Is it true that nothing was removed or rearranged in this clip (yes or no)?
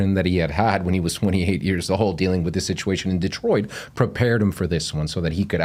yes